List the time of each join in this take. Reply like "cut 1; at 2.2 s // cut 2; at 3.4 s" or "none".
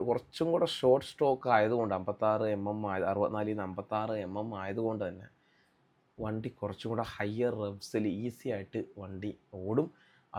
none